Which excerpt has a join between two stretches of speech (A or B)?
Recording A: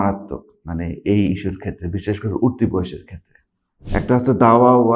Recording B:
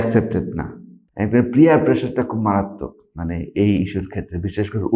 A